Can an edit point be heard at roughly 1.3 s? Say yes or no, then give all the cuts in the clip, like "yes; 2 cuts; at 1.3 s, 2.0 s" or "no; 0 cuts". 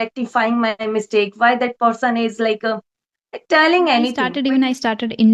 no; 1 cut; at 4.3 s